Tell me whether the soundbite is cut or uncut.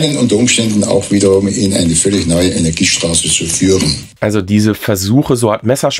uncut